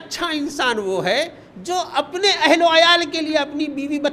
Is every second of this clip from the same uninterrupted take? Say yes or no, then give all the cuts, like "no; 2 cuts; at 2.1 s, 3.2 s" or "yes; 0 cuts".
yes; 0 cuts